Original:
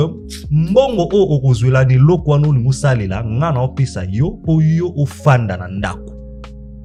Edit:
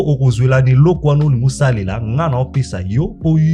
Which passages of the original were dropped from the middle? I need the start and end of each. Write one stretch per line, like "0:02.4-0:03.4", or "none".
none